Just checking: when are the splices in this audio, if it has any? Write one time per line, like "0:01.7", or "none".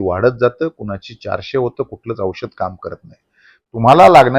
0:03.5